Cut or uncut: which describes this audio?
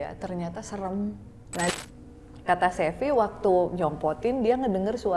cut